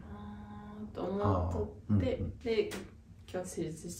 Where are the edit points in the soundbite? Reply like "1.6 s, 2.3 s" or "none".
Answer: 2.3 s